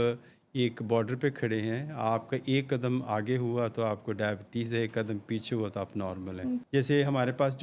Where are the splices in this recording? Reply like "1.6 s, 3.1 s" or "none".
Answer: 6.6 s